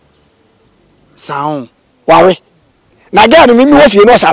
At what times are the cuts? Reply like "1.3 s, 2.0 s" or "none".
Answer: none